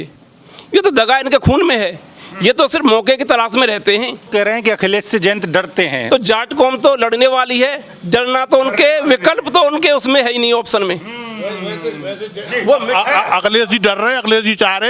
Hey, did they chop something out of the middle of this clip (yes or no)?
yes